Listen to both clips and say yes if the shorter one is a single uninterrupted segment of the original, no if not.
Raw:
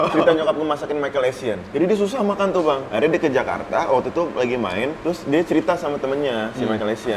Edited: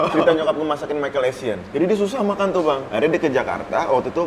yes